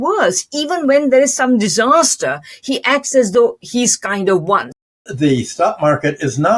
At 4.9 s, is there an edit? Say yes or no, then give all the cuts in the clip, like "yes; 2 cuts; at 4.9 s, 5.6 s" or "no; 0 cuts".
yes; 1 cut; at 4.9 s